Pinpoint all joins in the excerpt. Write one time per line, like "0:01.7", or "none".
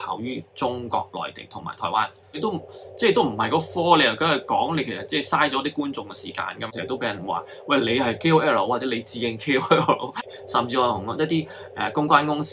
0:02.4
0:06.7
0:10.2

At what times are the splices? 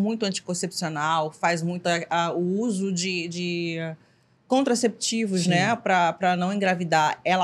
none

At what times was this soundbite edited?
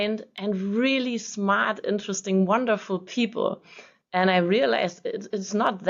none

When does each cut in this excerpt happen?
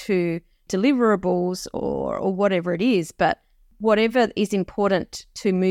none

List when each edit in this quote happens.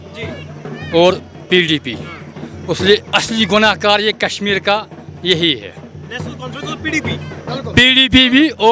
none

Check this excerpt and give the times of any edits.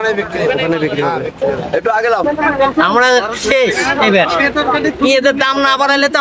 0:02.2

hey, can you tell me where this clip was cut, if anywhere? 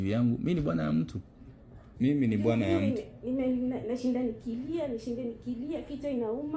0:01.8

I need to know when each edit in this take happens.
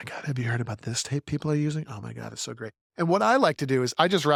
none

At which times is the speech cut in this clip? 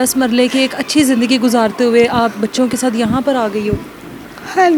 none

